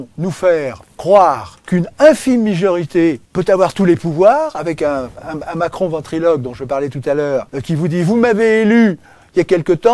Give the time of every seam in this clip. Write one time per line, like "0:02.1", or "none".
0:01.5
0:03.3
0:07.5